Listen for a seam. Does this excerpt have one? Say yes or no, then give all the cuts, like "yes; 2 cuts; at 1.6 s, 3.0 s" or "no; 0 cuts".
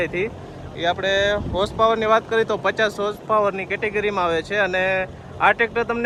no; 0 cuts